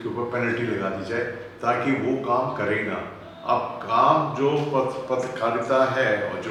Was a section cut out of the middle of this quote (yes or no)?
no